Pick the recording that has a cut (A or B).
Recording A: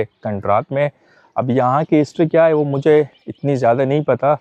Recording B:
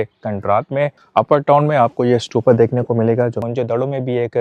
B